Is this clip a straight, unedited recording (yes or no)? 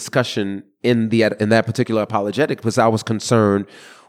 yes